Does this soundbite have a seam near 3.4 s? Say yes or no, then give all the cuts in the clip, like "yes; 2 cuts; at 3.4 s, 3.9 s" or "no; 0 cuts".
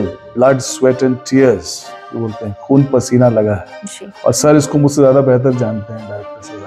no; 0 cuts